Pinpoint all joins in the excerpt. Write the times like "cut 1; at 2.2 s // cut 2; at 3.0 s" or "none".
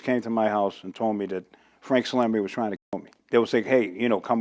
none